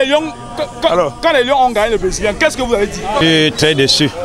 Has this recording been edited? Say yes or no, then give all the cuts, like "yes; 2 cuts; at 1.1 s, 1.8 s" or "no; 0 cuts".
yes; 1 cut; at 3.2 s